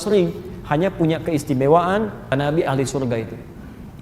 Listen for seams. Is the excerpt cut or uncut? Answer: cut